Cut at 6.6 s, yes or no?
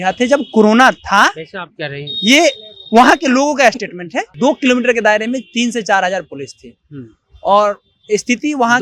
no